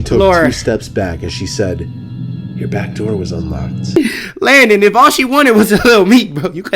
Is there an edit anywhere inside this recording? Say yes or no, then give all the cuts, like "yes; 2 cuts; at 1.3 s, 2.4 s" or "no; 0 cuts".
yes; 1 cut; at 4.0 s